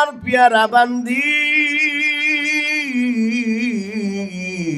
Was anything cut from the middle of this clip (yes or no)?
no